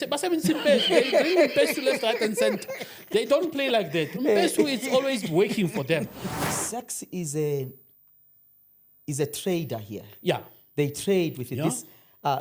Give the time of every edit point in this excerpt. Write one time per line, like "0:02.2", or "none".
0:06.4